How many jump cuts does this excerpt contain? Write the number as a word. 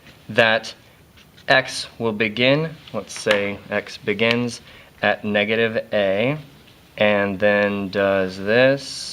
one